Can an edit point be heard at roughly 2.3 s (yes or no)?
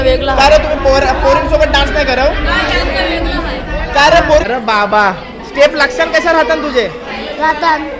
no